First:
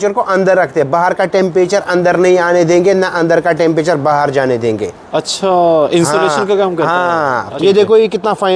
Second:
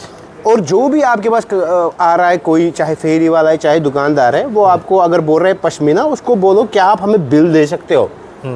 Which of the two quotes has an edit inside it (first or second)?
first